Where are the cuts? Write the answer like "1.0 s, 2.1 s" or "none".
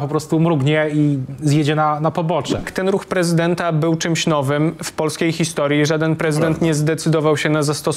2.7 s